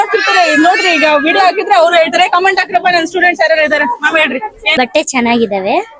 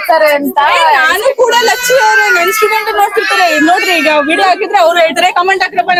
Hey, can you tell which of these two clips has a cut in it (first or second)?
first